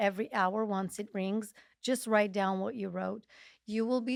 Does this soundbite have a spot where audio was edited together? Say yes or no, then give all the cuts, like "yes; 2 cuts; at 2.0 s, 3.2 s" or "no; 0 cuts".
no; 0 cuts